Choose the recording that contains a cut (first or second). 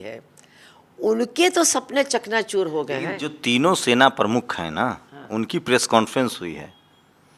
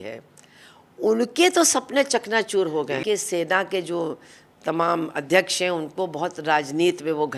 second